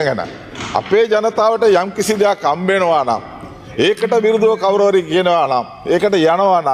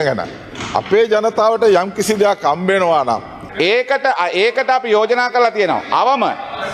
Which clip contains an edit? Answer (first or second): second